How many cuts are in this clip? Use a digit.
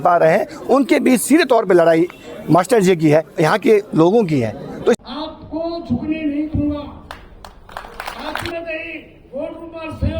2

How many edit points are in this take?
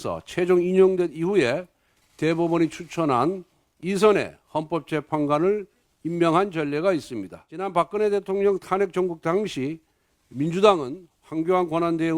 1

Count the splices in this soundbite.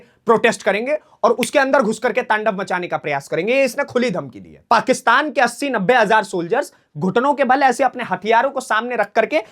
1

